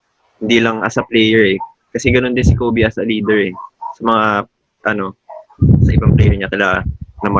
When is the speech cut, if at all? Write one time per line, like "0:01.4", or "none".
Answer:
none

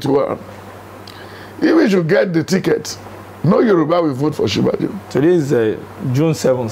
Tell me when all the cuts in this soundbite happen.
none

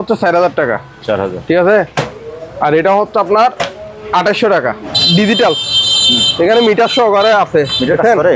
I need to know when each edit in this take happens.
0:04.9

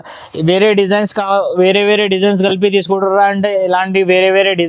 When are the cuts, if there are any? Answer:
none

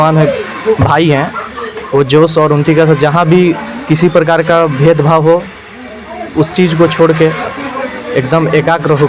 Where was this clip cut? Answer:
none

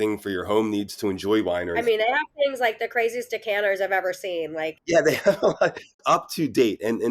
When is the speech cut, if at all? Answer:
0:01.7
0:04.8
0:05.7

